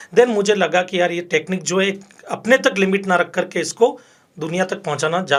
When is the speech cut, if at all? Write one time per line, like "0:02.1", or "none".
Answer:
none